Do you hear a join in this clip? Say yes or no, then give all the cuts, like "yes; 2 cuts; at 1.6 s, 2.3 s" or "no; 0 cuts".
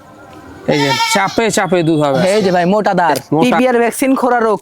yes; 1 cut; at 3.4 s